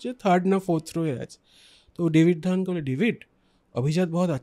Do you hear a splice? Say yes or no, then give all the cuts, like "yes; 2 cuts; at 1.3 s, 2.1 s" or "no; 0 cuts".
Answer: no; 0 cuts